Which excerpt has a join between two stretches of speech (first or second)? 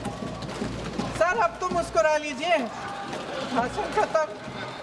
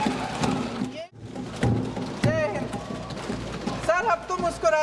second